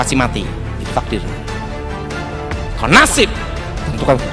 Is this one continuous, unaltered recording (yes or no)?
yes